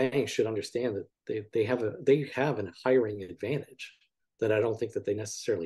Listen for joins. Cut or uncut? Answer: uncut